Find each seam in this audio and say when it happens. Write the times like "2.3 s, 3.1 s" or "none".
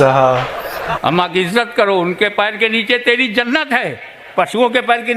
1.0 s